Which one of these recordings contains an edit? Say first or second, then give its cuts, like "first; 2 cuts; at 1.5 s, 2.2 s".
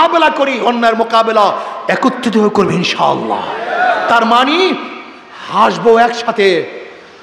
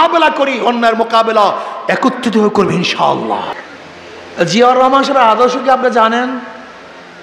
second; 1 cut; at 3.5 s